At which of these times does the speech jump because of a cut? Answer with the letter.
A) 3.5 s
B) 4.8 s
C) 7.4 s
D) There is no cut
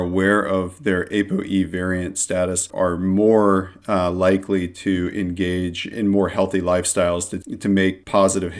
C